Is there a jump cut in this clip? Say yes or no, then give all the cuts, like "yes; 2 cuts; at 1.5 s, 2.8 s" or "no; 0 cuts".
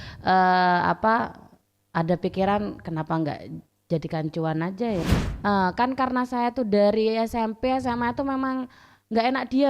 yes; 1 cut; at 5.0 s